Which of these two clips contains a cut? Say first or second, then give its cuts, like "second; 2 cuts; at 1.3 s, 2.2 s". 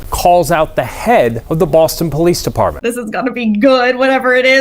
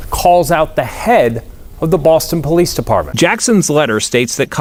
first; 2 cuts; at 1.4 s, 2.8 s